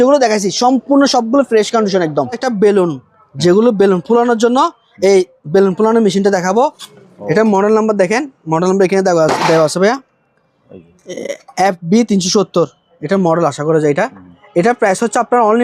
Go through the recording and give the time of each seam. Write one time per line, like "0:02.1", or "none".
0:02.4
0:06.9